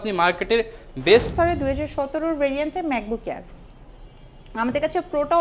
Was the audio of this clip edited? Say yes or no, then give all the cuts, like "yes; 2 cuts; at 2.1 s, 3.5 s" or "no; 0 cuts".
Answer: yes; 1 cut; at 1.3 s